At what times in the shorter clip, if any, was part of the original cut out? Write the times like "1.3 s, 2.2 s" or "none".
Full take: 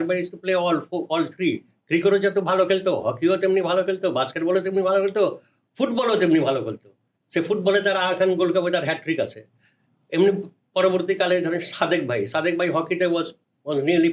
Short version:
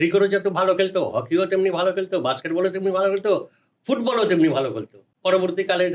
5.0 s